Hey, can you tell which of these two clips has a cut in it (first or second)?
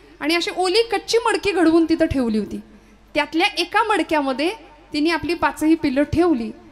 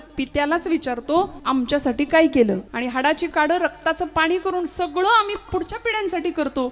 second